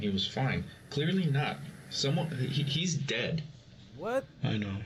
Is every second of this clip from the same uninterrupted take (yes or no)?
yes